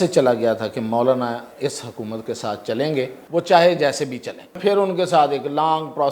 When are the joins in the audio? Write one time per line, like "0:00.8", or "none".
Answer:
0:03.2
0:04.6